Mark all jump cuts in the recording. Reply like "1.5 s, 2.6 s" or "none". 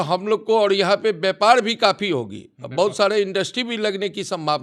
none